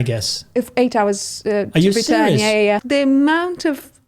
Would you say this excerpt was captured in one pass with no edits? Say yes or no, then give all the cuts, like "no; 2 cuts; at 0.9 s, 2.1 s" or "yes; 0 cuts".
no; 1 cut; at 2.8 s